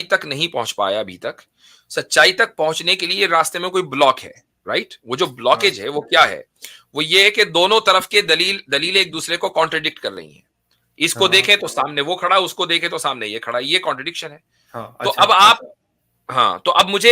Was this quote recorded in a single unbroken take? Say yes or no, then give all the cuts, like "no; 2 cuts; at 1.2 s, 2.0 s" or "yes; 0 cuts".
yes; 0 cuts